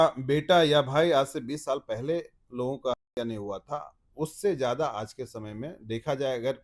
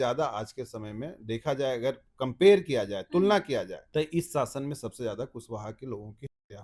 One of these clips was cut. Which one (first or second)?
second